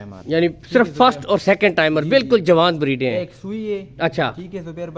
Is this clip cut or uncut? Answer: uncut